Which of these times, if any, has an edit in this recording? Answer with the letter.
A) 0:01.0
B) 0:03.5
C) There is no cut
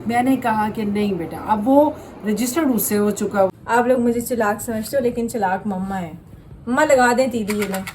B